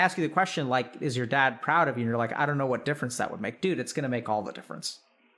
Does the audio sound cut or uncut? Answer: uncut